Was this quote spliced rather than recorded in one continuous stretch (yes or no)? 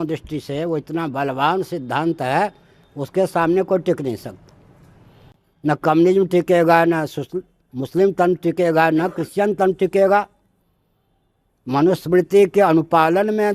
no